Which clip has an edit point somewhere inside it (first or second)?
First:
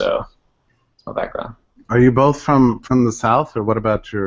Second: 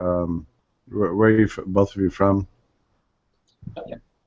first